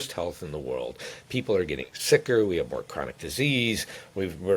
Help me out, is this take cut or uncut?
uncut